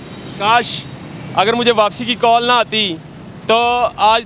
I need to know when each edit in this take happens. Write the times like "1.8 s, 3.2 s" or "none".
none